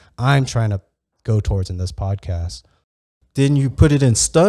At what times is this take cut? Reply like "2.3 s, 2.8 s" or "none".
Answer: 3.1 s